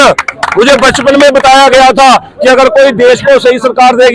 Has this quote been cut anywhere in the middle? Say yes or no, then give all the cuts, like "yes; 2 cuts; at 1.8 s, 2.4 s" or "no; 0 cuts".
no; 0 cuts